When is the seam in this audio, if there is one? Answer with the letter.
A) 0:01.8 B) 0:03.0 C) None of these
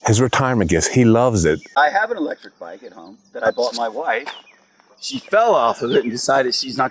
A